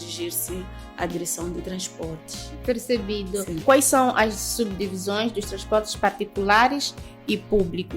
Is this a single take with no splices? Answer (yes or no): no